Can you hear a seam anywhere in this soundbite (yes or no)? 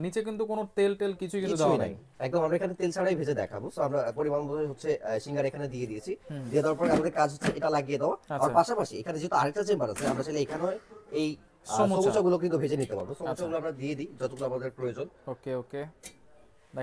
no